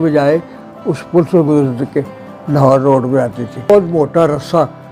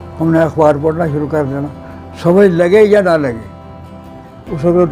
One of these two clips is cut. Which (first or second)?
first